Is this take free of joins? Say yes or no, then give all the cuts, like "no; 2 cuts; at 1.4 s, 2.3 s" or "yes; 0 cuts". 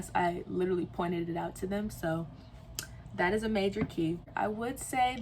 no; 1 cut; at 4.3 s